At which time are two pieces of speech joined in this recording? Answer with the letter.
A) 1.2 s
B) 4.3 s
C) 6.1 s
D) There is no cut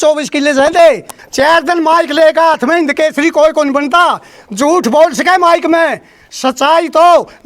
A